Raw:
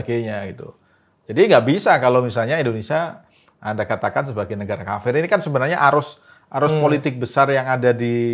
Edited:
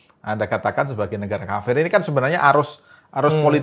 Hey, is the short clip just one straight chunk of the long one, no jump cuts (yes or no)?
yes